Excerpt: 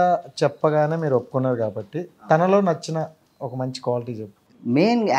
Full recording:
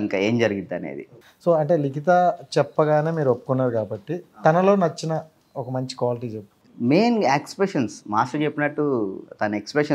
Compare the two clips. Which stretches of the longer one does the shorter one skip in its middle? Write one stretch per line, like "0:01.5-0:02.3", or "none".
none